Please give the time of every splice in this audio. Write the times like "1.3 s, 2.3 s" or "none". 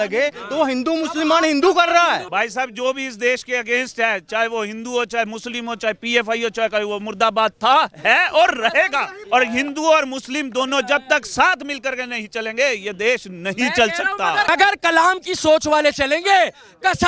2.3 s, 9.1 s, 14.5 s

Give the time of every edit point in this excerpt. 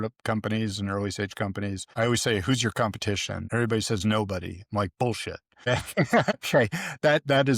1.8 s, 3.4 s, 5.6 s, 6.4 s

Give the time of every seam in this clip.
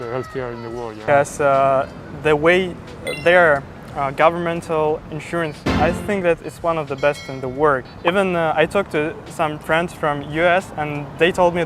1.1 s, 7.8 s

